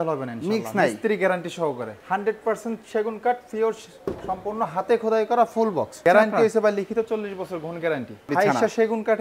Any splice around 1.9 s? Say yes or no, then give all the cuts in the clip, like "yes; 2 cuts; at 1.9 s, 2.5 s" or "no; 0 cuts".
yes; 3 cuts; at 1.9 s, 5.9 s, 8.3 s